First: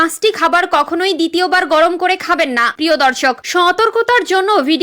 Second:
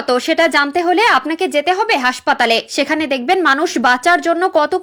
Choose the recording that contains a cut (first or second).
first